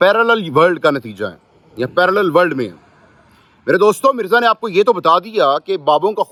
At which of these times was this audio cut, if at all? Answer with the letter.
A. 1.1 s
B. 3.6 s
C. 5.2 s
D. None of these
D